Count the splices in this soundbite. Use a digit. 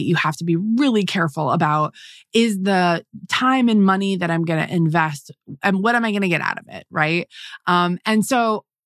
0